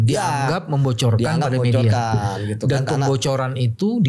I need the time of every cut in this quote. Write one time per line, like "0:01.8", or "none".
none